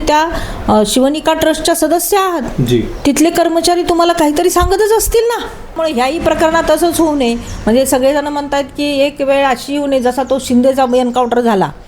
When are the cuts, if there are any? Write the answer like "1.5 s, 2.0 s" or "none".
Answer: 5.8 s

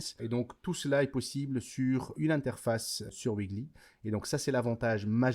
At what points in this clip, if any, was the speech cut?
2.2 s, 3.1 s

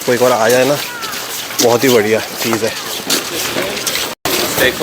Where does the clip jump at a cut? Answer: none

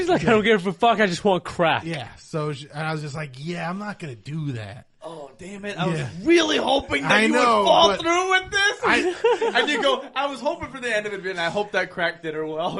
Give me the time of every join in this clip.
none

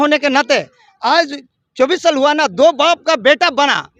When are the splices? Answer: none

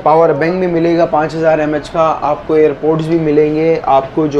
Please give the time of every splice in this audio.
none

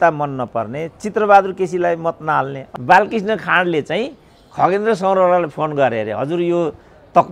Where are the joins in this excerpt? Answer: 2.7 s

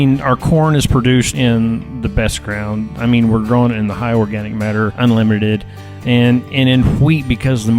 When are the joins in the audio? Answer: 1.3 s, 4.9 s

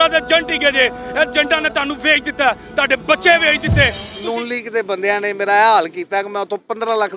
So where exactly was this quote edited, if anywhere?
4.1 s

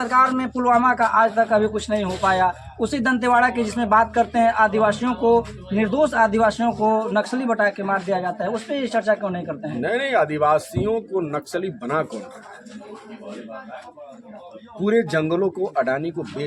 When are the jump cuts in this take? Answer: none

